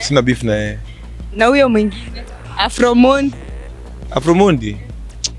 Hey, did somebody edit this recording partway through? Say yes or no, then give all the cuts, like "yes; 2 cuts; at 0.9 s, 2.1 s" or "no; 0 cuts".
no; 0 cuts